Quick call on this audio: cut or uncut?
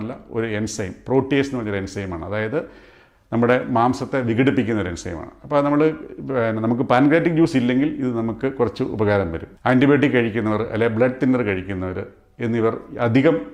cut